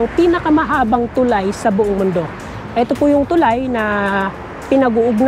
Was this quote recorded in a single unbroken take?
yes; 0 cuts

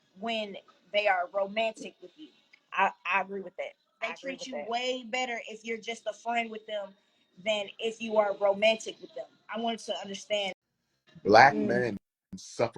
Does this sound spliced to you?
yes; 1 cut; at 10.5 s

